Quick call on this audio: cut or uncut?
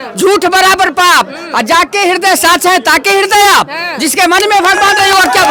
uncut